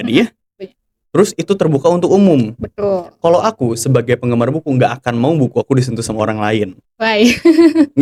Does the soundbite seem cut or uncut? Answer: uncut